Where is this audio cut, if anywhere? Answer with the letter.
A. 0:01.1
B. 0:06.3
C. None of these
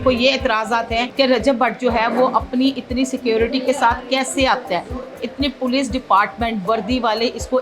A